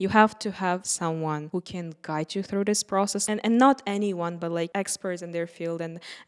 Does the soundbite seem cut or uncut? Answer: cut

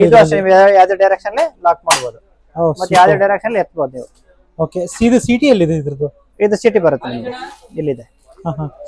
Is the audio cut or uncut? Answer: uncut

